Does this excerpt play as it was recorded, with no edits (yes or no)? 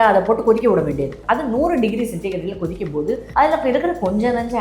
no